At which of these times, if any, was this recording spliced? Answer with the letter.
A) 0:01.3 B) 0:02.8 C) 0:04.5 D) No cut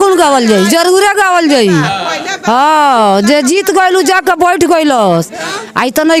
D